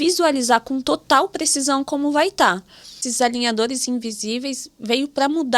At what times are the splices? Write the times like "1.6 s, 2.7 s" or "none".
3.0 s